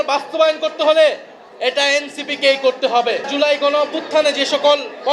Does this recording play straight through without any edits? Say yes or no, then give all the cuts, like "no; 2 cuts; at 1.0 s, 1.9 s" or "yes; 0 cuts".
no; 1 cut; at 3.3 s